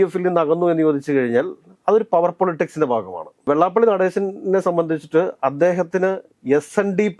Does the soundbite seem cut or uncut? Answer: uncut